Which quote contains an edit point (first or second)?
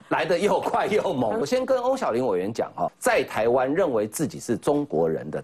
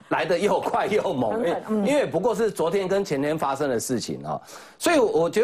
first